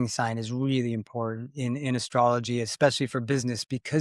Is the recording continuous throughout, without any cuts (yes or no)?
yes